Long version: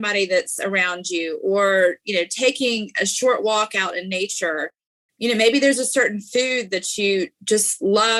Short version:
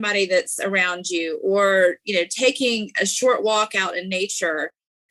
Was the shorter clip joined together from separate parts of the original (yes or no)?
no